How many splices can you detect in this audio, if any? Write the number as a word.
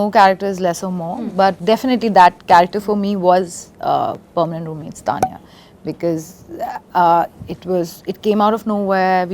one